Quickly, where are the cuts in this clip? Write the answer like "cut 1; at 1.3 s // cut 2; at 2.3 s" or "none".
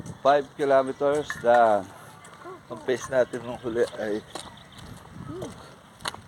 none